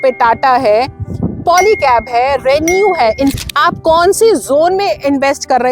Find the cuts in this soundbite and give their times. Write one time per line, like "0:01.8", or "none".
0:03.4